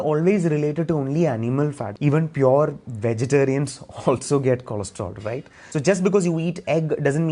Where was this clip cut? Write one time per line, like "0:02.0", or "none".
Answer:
0:01.9
0:05.6

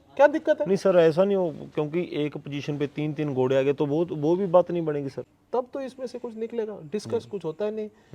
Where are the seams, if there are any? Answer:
0:05.1

